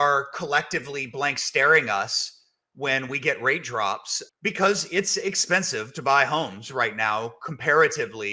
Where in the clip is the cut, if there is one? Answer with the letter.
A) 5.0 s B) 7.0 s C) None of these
C